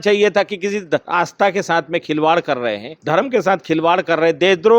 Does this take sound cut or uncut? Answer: cut